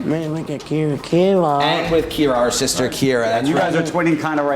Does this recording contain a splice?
no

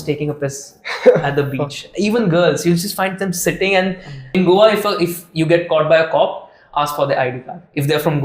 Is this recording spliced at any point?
yes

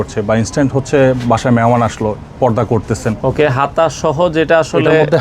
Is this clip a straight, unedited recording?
no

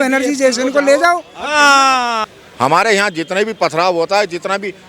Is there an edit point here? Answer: yes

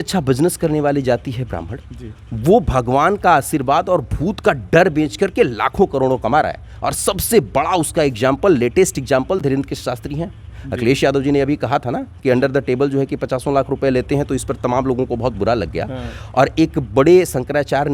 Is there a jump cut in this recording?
no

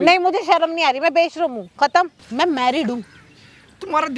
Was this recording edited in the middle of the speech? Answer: yes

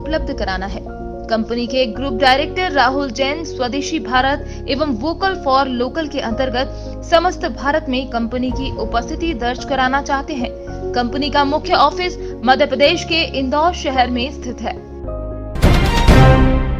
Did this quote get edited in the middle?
yes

